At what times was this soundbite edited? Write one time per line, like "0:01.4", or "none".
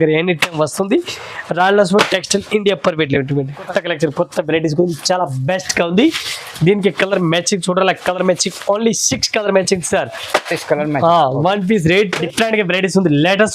0:03.7
0:12.2